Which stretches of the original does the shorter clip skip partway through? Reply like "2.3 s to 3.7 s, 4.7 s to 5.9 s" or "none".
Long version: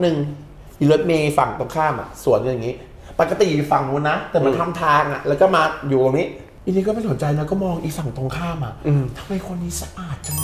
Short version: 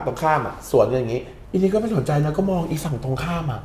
2.9 s to 6.5 s